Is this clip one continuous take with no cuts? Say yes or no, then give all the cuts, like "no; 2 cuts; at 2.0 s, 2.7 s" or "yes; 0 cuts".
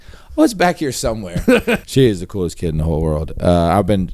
no; 1 cut; at 1.8 s